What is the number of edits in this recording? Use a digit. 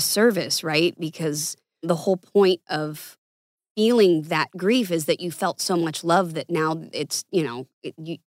1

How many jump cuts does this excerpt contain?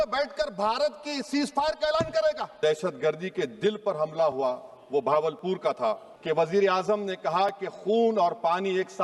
2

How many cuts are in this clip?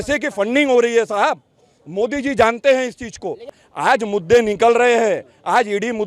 1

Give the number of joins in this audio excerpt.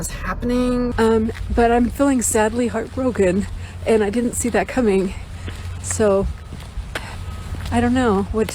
1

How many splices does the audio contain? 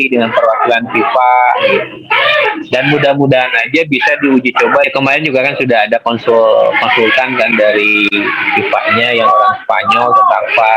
1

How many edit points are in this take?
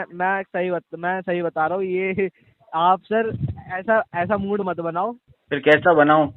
1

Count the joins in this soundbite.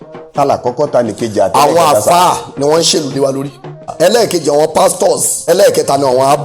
2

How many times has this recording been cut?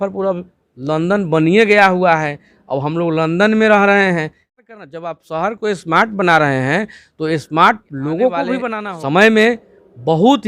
2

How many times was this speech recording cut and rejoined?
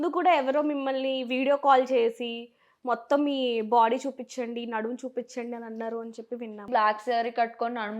1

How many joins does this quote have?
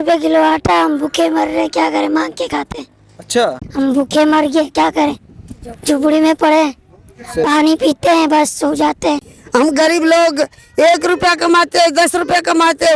2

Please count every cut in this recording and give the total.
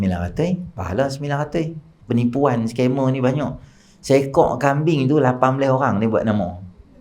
1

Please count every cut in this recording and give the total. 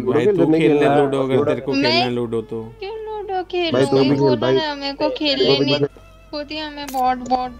1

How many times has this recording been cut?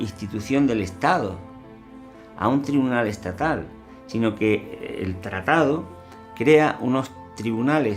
0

